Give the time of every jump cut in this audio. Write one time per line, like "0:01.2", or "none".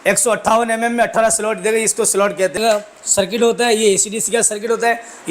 0:02.6